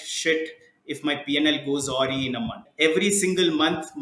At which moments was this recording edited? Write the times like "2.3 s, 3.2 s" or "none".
2.6 s